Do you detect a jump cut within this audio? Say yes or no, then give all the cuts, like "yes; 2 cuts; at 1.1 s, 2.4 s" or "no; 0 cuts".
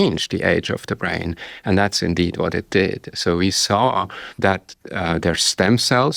yes; 1 cut; at 4.2 s